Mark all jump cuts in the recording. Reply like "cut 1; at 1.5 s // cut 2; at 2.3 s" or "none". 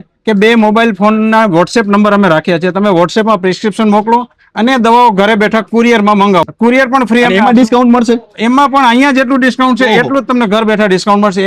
cut 1; at 6.4 s